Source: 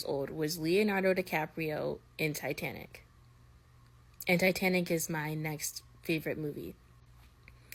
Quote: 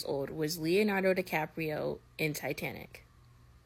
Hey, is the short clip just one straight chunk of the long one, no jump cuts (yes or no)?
yes